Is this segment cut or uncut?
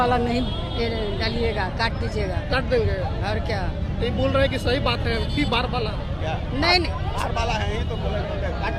uncut